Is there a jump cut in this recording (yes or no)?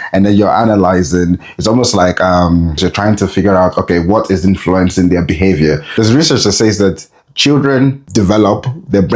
yes